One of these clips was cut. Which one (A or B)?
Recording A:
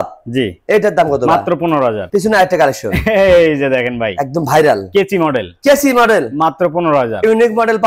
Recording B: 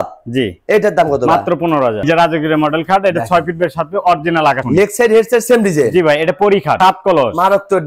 B